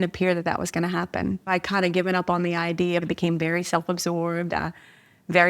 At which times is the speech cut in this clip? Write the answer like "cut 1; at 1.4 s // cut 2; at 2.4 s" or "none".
cut 1; at 1.5 s // cut 2; at 3.0 s